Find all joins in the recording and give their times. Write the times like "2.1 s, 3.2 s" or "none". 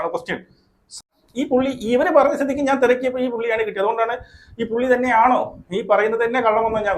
1.0 s